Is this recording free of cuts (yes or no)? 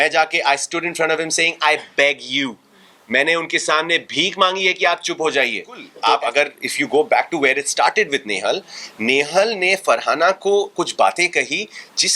no